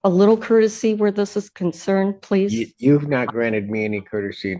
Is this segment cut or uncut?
uncut